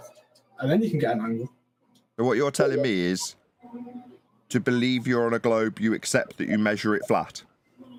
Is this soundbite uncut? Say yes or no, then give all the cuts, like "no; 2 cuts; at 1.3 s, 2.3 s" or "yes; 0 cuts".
yes; 0 cuts